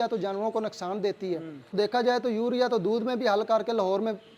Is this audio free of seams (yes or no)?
no